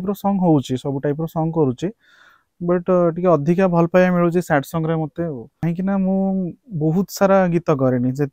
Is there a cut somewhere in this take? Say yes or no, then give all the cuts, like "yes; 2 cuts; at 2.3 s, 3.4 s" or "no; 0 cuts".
yes; 1 cut; at 5.5 s